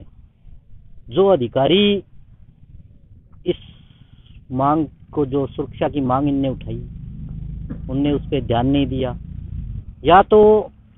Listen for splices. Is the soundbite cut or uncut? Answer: uncut